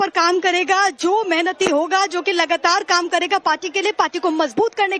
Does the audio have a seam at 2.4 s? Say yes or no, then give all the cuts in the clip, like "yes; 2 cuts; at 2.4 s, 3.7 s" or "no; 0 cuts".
yes; 1 cut; at 2.4 s